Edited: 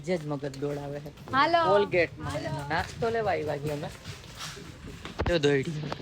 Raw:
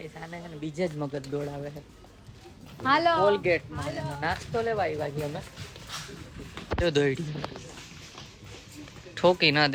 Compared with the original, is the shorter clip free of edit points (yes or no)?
no